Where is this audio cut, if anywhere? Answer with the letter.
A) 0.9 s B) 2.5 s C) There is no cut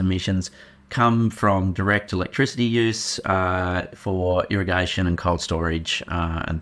C